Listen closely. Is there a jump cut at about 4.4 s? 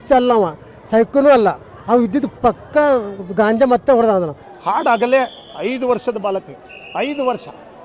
yes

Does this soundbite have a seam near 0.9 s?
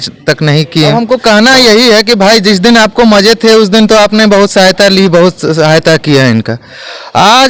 yes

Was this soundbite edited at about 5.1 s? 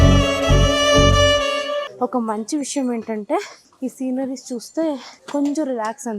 yes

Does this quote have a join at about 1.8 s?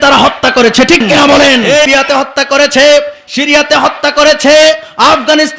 yes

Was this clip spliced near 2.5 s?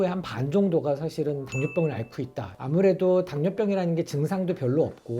yes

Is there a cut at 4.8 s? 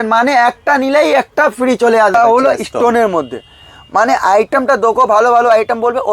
no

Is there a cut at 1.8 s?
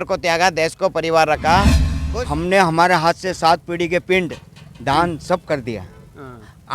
yes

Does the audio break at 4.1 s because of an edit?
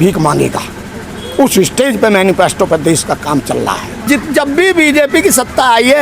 yes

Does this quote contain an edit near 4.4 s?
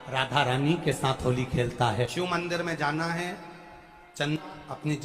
yes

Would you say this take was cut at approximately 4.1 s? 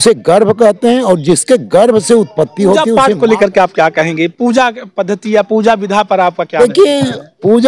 no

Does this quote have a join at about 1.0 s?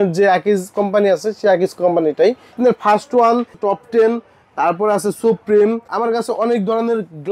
no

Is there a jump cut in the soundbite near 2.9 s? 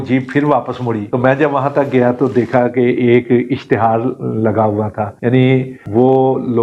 no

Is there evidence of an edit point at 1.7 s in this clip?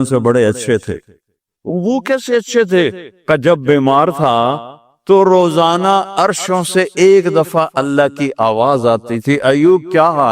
yes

